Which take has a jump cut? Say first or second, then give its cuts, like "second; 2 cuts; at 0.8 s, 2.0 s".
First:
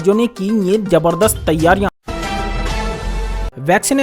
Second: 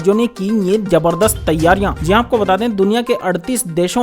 first; 1 cut; at 2.0 s